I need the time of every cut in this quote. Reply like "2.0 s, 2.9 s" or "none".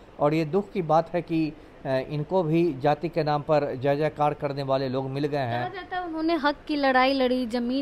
none